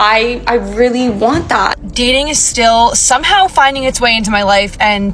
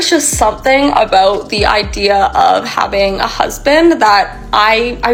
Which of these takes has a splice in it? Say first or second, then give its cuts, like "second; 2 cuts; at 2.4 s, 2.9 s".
first; 1 cut; at 1.8 s